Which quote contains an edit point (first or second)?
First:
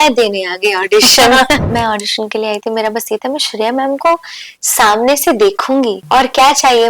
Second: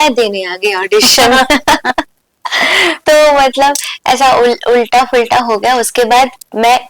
first